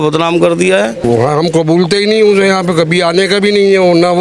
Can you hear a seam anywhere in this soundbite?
yes; 1 cut; at 1.0 s

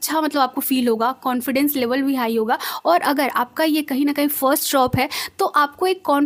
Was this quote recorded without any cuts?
yes; 0 cuts

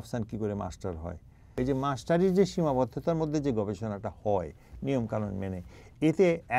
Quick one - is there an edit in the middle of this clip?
yes; 1 cut; at 1.5 s

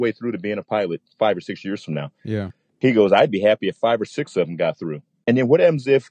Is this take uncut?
no; 1 cut; at 5.2 s

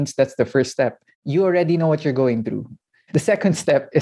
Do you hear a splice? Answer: no; 0 cuts

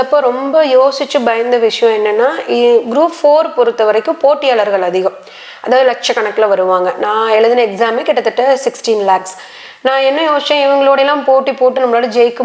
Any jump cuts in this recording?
no; 0 cuts

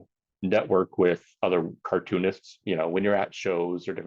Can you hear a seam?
yes; 1 cut; at 2.5 s

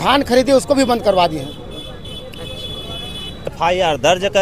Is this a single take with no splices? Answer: no; 1 cut; at 3.5 s

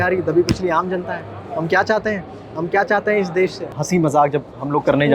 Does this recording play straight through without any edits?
no; 1 cut; at 3.7 s

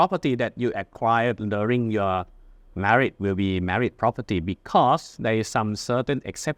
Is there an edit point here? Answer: no; 0 cuts

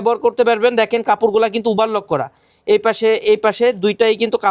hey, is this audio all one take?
yes; 0 cuts

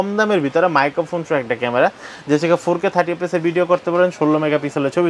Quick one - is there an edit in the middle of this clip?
no; 0 cuts

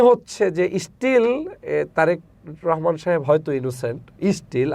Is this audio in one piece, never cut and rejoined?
yes; 0 cuts

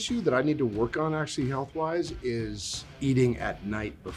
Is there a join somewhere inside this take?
no; 0 cuts

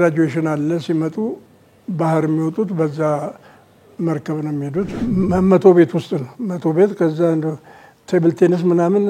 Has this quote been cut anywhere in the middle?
yes; 1 cut; at 4.9 s

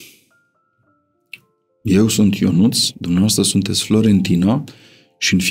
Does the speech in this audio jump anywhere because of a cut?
no; 0 cuts

